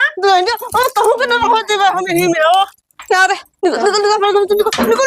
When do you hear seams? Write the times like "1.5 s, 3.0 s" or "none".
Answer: 3.5 s

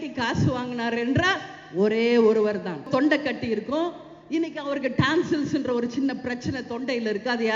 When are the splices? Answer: 2.9 s

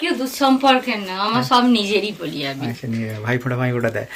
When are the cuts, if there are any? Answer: none

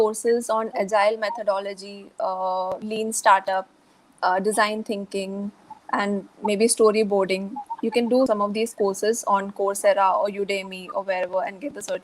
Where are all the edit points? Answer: 5.7 s, 8.3 s

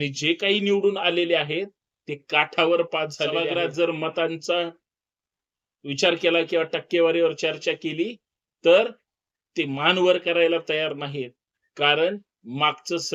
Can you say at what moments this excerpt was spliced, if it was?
3.3 s

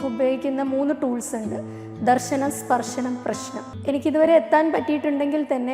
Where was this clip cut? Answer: 3.7 s

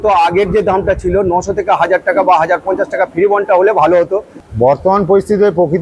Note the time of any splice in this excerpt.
4.4 s

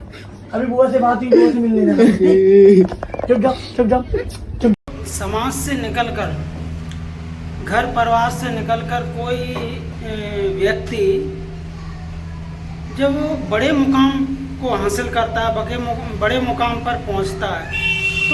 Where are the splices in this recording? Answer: 4.7 s

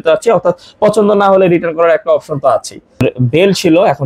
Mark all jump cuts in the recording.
3.0 s

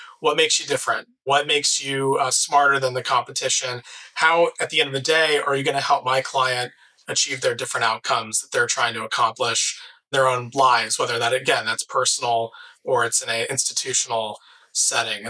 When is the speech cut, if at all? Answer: 1.2 s, 10.1 s

